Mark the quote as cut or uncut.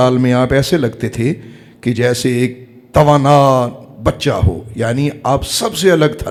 uncut